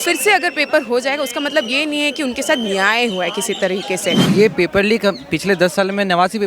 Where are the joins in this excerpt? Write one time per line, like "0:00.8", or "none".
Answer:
0:04.2